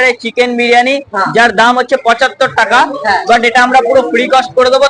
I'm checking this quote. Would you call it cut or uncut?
uncut